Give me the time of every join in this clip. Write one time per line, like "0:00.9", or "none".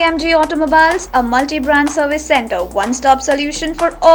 none